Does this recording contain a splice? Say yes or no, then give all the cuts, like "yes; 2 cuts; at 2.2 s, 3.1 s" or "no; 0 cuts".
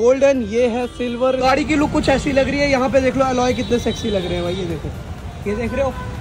yes; 1 cut; at 1.4 s